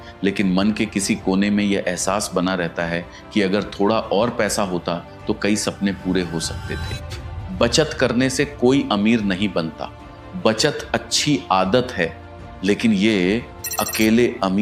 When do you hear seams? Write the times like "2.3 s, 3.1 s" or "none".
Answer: 7.1 s